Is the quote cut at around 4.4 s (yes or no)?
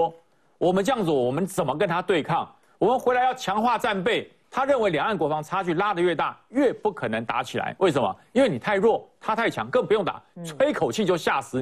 yes